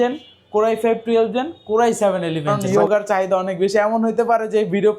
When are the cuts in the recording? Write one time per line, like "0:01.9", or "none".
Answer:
0:02.6